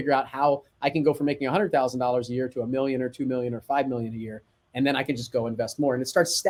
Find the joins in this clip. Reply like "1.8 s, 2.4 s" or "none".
none